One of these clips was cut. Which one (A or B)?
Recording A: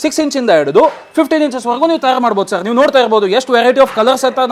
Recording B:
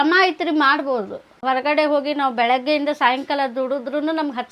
B